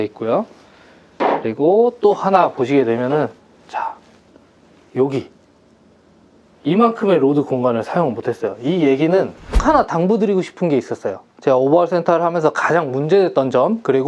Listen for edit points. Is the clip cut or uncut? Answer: cut